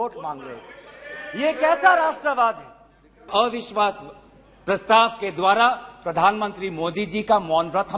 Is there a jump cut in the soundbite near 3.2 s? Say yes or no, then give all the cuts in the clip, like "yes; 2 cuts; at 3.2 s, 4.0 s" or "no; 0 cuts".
yes; 1 cut; at 3.2 s